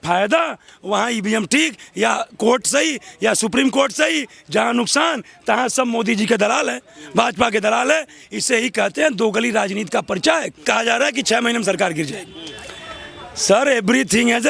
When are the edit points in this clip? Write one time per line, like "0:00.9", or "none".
0:10.6